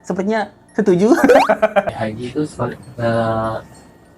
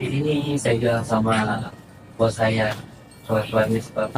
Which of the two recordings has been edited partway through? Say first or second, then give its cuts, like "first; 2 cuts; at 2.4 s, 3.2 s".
first; 1 cut; at 2.0 s